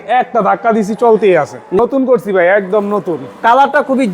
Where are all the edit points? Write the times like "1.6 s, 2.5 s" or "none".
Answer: 1.8 s